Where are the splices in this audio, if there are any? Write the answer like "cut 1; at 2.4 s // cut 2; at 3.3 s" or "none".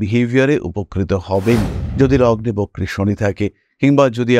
cut 1; at 1.8 s